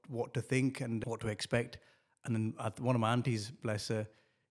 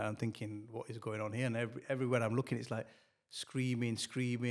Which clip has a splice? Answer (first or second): first